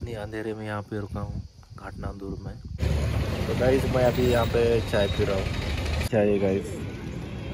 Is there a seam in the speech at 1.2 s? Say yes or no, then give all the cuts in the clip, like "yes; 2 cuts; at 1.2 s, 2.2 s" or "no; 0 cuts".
no; 2 cuts; at 2.7 s, 6.0 s